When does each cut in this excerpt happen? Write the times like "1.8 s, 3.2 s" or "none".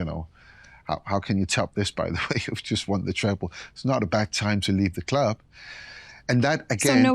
none

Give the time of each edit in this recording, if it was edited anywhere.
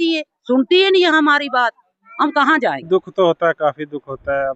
2.8 s

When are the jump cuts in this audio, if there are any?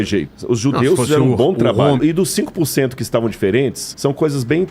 2.0 s, 3.8 s

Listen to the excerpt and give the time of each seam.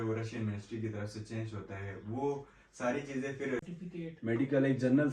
3.6 s

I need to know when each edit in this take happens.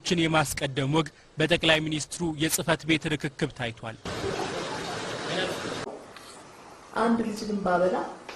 6.0 s

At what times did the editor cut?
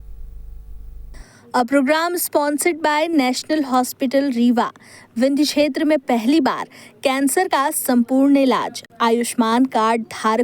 1.1 s

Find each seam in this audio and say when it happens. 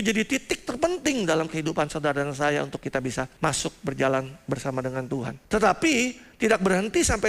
3.3 s, 5.4 s

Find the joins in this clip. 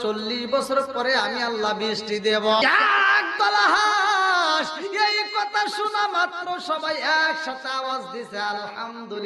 2.6 s

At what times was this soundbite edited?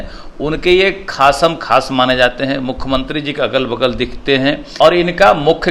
4.7 s

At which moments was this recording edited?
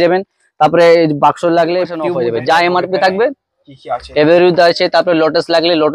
2.0 s

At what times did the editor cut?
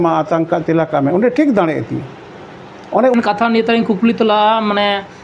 3.1 s

